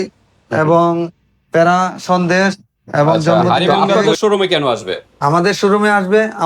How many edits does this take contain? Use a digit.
1